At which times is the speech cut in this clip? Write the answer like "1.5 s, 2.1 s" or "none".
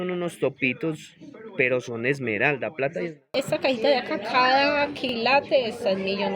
3.3 s